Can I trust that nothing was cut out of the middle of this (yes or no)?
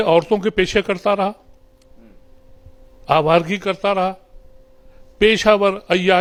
yes